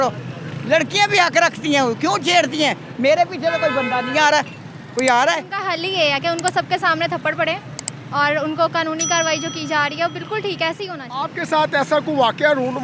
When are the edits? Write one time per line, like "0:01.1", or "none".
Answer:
0:05.6
0:11.0